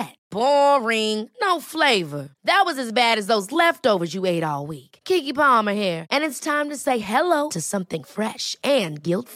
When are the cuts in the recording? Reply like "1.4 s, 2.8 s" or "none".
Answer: none